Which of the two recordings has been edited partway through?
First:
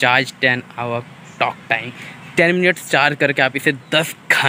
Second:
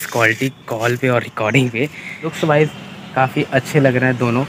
second; 1 cut; at 2.3 s

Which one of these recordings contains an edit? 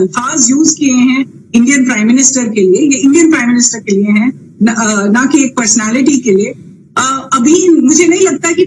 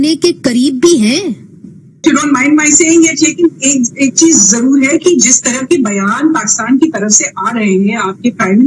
second; 1 cut; at 2.0 s

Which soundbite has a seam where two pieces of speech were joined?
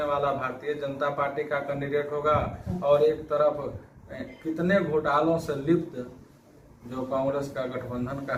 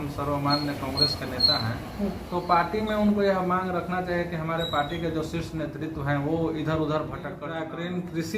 second; 1 cut; at 7.4 s

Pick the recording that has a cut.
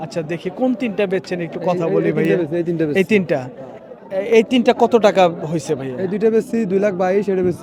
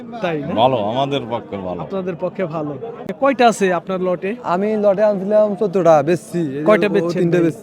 second; 1 cut; at 3.1 s

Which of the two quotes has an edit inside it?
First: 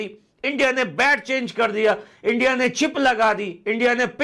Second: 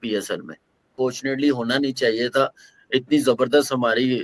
second; 1 cut; at 0.9 s

